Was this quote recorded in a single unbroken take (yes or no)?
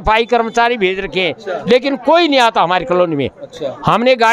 yes